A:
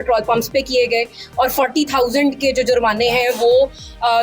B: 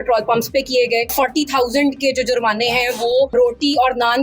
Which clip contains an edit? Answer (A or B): B